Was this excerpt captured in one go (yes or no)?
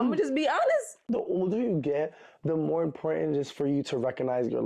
no